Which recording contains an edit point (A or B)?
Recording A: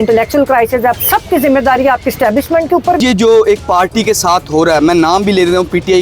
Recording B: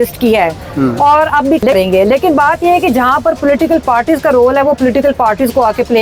A